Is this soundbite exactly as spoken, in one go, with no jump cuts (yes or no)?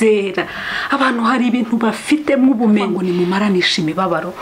no